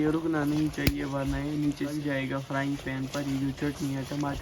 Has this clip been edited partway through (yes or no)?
yes